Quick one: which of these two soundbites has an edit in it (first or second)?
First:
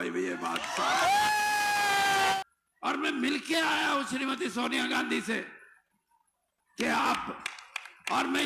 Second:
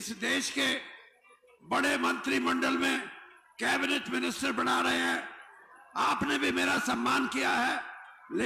first